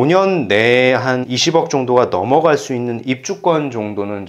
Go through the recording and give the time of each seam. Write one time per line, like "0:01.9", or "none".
0:01.3